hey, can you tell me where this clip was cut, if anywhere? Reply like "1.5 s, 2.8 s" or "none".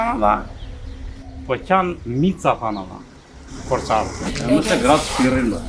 4.2 s

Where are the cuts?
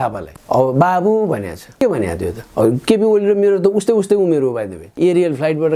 4.8 s

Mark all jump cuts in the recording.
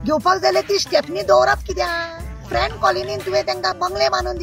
2.5 s

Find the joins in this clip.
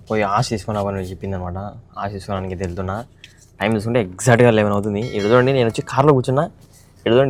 none

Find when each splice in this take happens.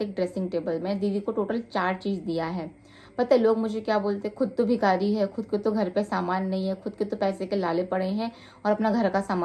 none

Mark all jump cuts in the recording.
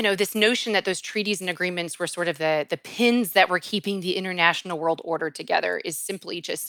none

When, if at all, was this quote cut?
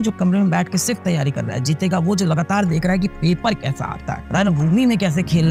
none

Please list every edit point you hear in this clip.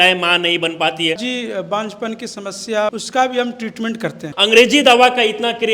1.2 s, 2.9 s, 4.3 s

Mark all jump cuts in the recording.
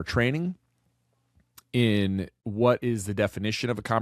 2.4 s

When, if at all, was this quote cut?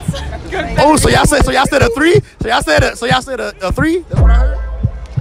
none

